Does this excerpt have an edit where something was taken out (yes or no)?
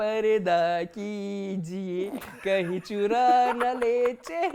no